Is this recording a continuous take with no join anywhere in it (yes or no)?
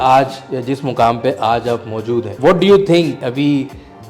no